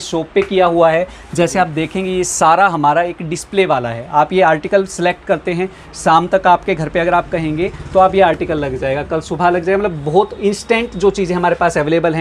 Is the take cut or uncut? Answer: uncut